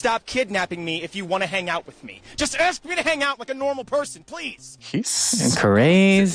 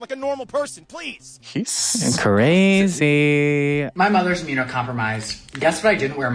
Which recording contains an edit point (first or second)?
second